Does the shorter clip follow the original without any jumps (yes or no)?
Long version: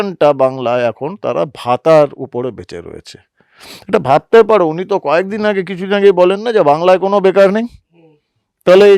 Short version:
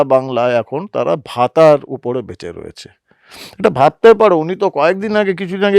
yes